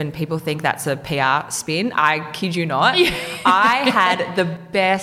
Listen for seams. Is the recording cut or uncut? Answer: uncut